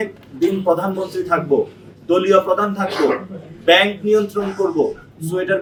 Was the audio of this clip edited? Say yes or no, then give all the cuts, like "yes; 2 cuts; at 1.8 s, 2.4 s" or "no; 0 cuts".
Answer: no; 0 cuts